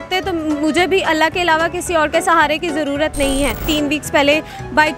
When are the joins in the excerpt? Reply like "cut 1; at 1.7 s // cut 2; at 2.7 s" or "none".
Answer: cut 1; at 3.6 s